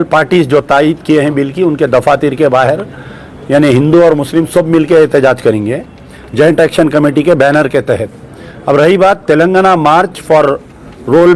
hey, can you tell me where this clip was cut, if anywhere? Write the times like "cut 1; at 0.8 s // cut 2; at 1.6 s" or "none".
none